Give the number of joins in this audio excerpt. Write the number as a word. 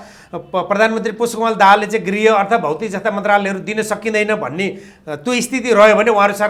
zero